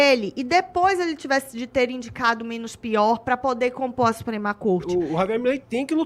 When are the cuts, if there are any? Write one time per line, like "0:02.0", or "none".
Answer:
0:04.8